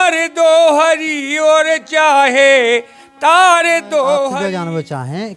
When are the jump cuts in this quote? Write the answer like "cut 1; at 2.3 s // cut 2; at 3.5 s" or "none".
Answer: cut 1; at 4.4 s